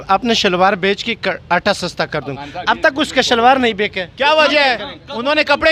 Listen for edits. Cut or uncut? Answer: uncut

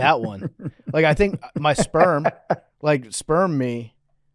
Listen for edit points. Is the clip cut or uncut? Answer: uncut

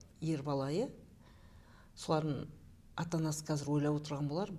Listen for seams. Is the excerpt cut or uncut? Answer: uncut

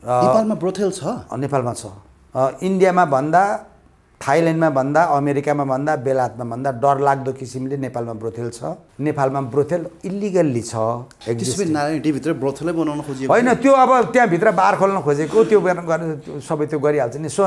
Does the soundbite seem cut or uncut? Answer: cut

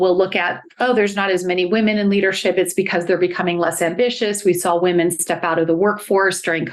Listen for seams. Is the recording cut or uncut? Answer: uncut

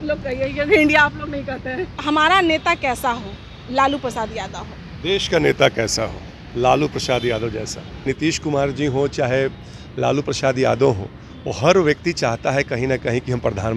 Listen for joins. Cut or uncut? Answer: cut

